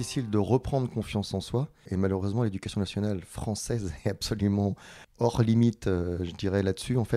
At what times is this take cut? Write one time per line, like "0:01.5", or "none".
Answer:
none

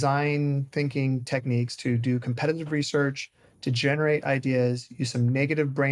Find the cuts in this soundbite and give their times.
none

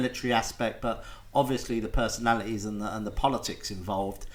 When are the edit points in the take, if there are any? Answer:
none

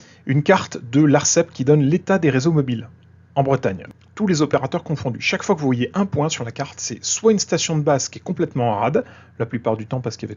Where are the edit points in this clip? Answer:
0:03.8

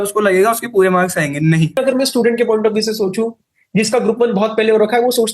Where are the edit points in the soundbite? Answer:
0:01.8

